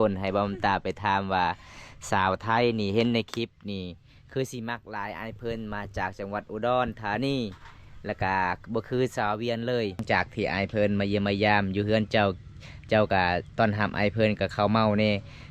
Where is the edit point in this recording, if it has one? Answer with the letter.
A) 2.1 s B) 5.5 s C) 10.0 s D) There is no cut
C